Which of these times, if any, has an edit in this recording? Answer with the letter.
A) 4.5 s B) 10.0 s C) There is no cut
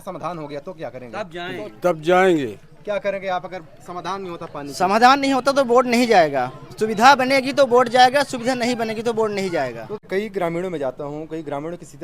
B